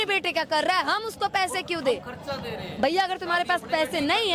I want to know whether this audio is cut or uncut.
uncut